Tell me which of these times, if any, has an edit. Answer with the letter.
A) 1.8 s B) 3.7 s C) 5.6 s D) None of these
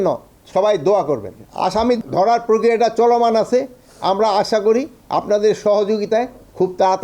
A